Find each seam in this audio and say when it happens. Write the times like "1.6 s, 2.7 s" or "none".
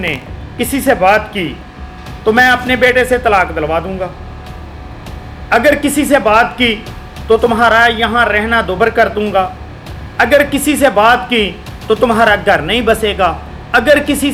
none